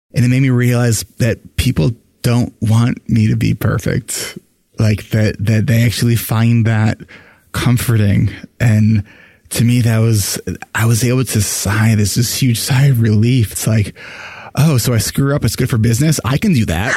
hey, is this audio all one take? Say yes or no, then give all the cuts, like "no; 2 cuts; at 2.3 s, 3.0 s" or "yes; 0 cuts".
yes; 0 cuts